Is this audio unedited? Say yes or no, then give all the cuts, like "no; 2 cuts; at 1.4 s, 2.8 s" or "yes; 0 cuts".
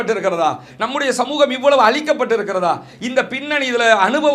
yes; 0 cuts